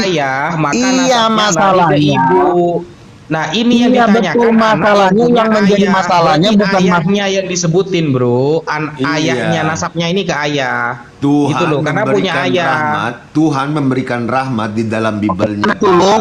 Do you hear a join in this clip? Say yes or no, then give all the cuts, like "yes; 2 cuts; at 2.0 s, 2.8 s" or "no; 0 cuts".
no; 0 cuts